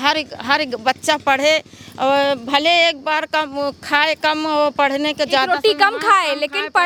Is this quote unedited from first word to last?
yes; 0 cuts

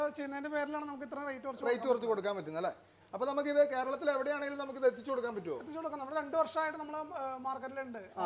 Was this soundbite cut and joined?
no; 0 cuts

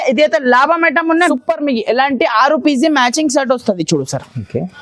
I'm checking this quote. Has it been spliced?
yes; 1 cut; at 1.3 s

